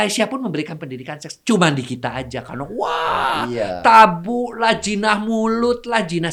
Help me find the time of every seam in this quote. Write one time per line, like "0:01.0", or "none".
none